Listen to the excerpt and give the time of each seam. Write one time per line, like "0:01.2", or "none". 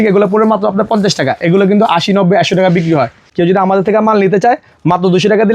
0:03.2